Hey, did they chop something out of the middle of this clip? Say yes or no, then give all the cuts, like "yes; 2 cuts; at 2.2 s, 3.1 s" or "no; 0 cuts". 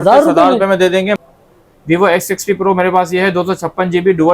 yes; 1 cut; at 1.2 s